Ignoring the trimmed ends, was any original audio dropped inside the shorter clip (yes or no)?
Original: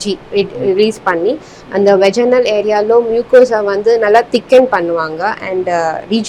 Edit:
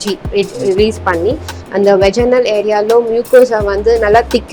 no